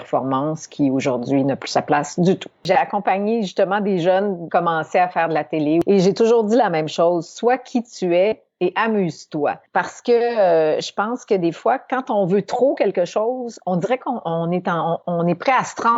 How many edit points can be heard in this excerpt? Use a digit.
4